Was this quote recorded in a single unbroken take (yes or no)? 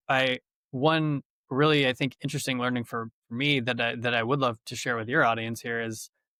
yes